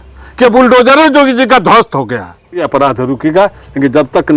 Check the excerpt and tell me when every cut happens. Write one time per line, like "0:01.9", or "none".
0:02.7